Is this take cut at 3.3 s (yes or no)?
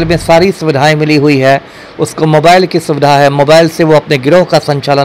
no